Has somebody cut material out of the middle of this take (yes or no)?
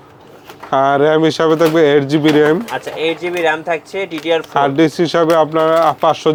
no